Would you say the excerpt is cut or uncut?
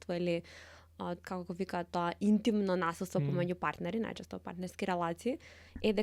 uncut